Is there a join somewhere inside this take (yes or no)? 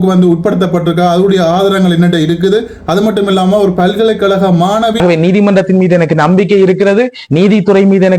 yes